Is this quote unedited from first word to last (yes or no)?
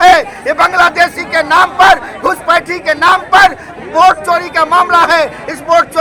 yes